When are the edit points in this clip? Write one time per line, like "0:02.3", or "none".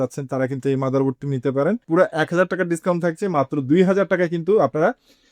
0:01.8